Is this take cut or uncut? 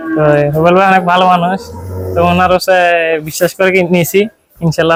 uncut